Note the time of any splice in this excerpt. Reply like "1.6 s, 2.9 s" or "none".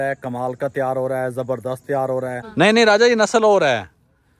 2.4 s